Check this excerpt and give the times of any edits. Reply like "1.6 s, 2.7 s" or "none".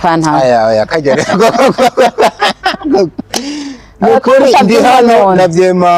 none